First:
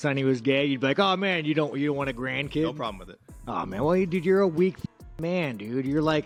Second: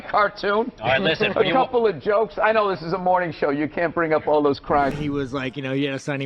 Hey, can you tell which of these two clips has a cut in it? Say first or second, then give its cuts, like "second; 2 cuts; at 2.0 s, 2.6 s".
second; 1 cut; at 5.0 s